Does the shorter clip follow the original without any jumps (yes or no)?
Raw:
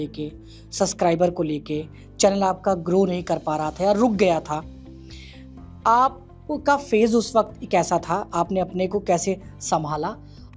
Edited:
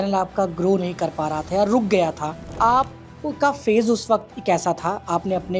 no